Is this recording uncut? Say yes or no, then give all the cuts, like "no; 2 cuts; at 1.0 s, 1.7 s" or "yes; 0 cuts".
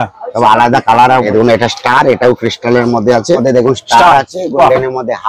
no; 2 cuts; at 1.3 s, 3.4 s